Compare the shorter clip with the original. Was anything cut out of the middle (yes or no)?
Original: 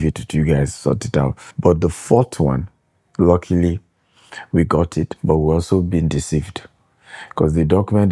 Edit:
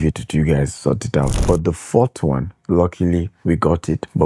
yes